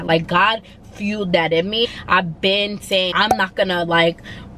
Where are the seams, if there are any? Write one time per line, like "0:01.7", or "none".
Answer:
0:01.8
0:03.1